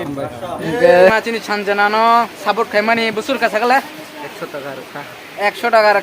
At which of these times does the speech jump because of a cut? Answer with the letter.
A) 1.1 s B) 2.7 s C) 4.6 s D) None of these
A